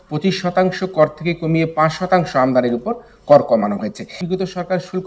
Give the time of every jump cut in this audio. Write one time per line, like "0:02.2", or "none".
0:04.2

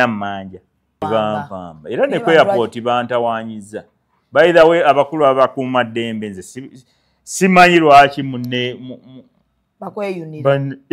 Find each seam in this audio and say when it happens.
0:01.0

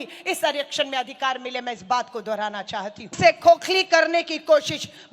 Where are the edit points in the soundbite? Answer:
0:03.1

